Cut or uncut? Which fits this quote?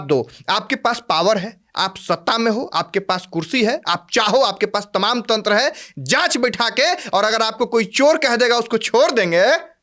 uncut